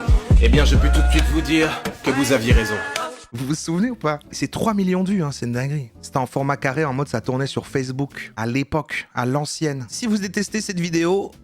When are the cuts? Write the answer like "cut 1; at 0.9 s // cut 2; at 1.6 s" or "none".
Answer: cut 1; at 3.2 s // cut 2; at 4.2 s // cut 3; at 5.8 s // cut 4; at 10.0 s